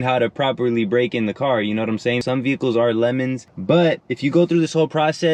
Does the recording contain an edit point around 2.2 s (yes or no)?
yes